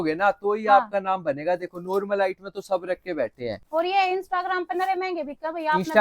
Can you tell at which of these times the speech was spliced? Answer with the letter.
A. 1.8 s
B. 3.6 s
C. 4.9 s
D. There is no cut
B